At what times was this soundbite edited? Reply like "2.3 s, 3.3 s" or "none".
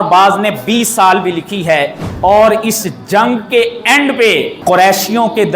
2.0 s, 4.5 s